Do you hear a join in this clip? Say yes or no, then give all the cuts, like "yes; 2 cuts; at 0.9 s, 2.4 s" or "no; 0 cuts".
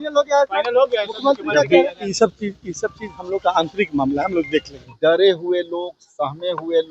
yes; 2 cuts; at 2.1 s, 4.8 s